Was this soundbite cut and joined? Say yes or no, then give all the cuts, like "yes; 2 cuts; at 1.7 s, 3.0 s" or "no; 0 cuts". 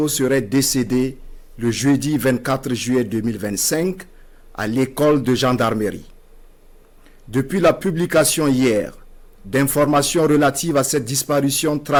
no; 0 cuts